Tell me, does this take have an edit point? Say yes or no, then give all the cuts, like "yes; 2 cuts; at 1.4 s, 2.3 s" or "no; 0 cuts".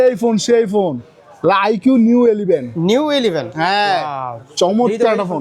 no; 0 cuts